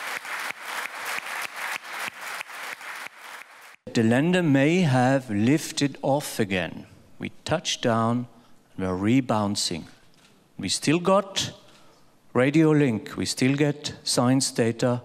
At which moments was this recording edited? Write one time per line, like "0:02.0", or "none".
0:00.9